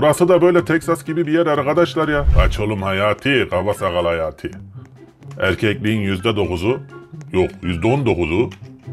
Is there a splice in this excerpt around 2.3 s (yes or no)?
yes